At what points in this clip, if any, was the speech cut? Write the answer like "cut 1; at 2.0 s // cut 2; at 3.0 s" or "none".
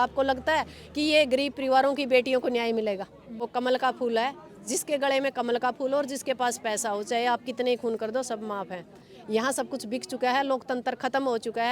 cut 1; at 3.5 s